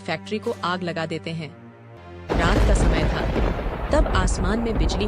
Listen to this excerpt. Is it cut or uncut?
cut